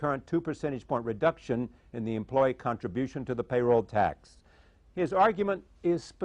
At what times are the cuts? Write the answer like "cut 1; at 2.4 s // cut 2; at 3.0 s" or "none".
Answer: cut 1; at 1.7 s